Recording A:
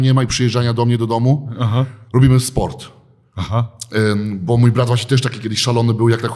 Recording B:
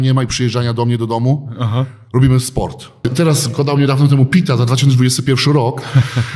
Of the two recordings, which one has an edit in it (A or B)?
B